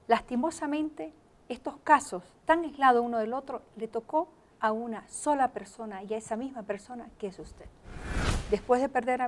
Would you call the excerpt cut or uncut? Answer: cut